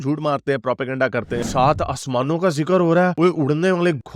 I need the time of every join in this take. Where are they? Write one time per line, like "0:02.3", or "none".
0:01.4